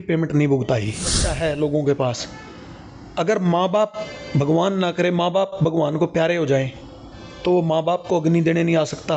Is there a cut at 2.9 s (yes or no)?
no